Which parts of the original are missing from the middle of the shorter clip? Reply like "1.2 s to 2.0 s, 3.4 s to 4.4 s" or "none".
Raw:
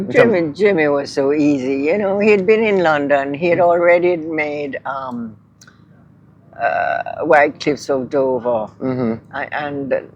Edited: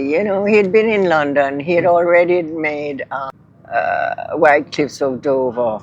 5.0 s to 6.2 s